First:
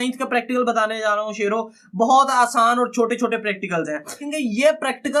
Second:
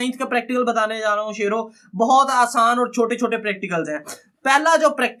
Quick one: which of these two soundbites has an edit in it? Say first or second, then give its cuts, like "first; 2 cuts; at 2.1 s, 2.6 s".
first; 1 cut; at 4.3 s